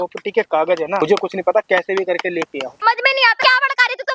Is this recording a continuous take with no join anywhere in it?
no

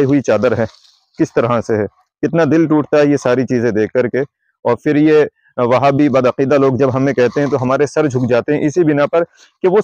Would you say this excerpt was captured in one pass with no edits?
yes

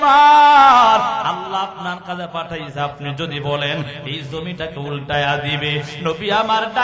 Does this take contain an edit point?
no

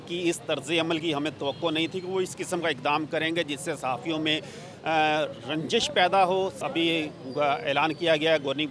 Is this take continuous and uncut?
no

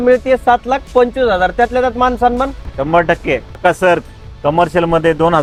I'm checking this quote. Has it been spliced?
no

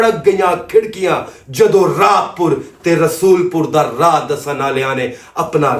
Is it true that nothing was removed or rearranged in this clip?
yes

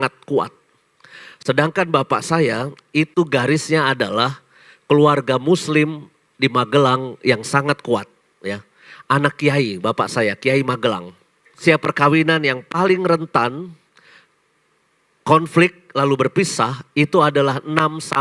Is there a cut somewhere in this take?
yes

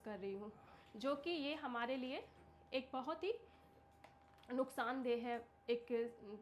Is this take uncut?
yes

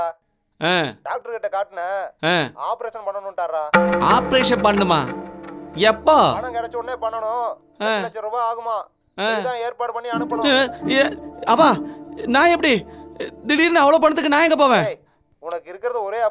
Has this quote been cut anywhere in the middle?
no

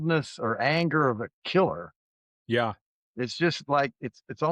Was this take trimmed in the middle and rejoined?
no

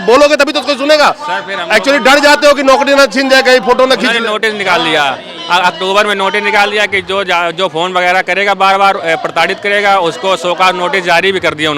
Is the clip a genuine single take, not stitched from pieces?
yes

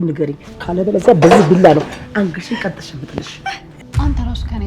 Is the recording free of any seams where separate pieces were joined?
no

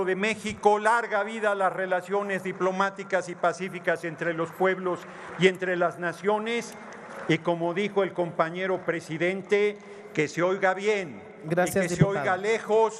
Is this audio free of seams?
yes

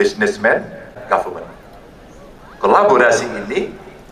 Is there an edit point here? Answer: yes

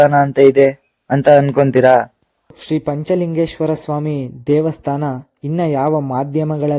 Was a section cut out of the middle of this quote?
yes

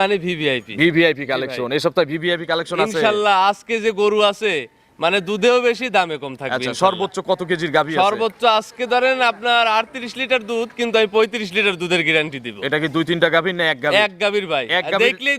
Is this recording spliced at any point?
no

